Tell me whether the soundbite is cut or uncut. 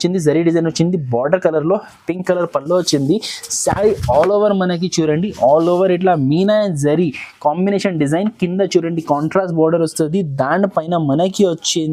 uncut